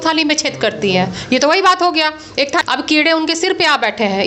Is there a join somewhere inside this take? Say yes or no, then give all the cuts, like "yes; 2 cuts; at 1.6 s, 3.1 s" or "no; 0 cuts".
yes; 1 cut; at 2.6 s